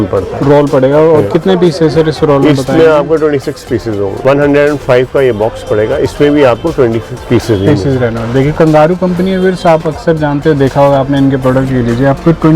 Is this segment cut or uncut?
cut